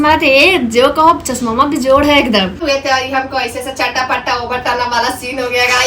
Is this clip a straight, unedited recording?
no; 1 cut; at 2.6 s

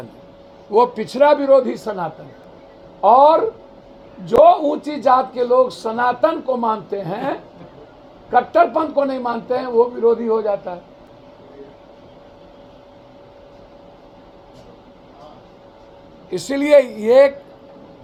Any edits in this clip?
no; 0 cuts

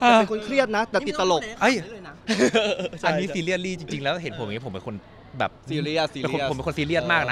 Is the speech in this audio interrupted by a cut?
no; 0 cuts

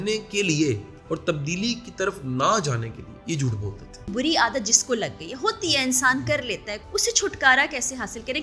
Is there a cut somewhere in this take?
yes; 3 cuts; at 0.9 s, 4.1 s, 6.8 s

